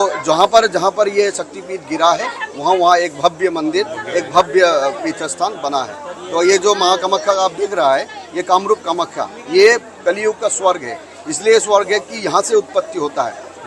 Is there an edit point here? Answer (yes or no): no